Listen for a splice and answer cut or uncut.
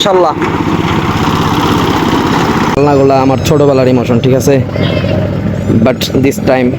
cut